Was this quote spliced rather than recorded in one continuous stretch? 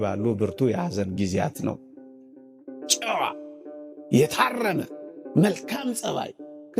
yes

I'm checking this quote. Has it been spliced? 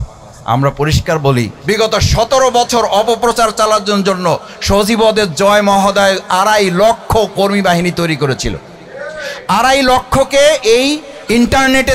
yes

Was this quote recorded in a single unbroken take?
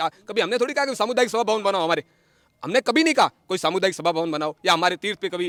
yes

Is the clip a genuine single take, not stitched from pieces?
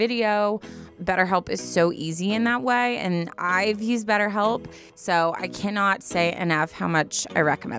no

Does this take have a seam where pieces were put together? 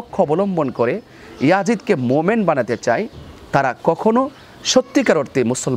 no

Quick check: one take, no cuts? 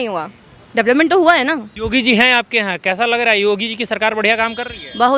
no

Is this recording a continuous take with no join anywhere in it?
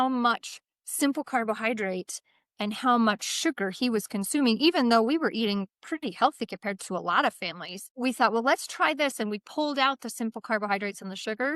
yes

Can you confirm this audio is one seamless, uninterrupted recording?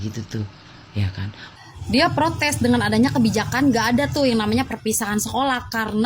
no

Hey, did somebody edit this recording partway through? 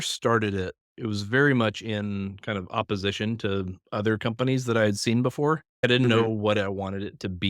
yes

